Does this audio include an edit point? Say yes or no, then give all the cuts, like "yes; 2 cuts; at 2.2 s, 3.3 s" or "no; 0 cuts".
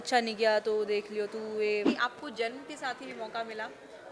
yes; 1 cut; at 1.9 s